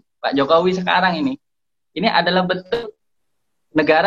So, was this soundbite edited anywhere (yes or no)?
yes